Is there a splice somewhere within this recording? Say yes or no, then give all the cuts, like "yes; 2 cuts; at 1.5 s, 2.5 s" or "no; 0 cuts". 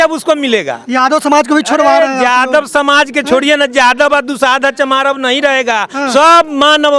no; 0 cuts